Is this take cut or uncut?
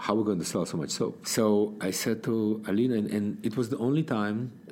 cut